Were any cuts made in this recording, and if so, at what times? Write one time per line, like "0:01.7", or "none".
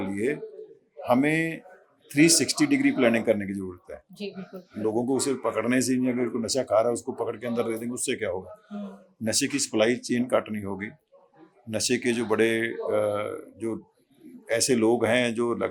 none